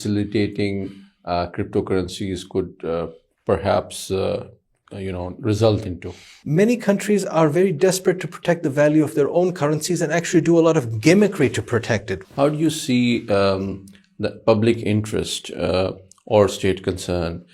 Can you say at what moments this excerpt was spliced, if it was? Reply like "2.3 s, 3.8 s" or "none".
6.3 s, 12.2 s